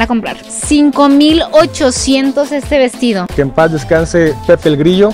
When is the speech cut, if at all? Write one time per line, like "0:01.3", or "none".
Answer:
0:03.3